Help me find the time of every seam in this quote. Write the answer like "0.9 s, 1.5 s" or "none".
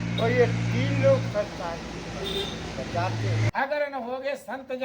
3.5 s